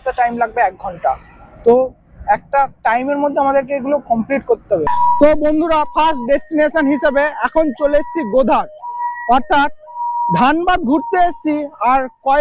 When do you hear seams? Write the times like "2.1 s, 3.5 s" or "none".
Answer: 4.9 s